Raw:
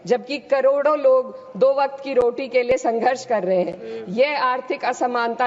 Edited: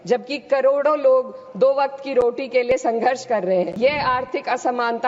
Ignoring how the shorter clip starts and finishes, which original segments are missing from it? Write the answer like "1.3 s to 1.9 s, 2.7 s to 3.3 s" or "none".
3.7 s to 4.1 s